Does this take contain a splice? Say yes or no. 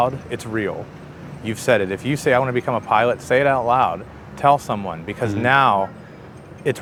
no